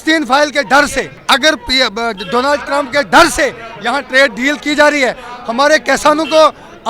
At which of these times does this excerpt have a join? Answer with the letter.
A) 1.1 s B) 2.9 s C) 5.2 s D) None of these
A